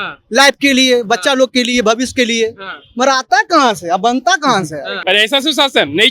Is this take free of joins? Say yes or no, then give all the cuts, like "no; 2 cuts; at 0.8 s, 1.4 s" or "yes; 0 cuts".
no; 1 cut; at 4.9 s